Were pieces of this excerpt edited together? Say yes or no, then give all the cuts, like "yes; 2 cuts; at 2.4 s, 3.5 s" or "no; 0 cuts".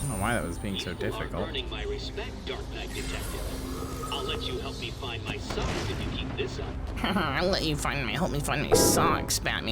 yes; 1 cut; at 6.8 s